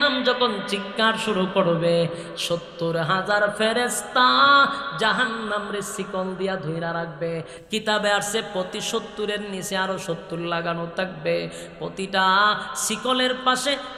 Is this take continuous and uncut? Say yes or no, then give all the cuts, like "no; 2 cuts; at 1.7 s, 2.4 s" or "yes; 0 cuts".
yes; 0 cuts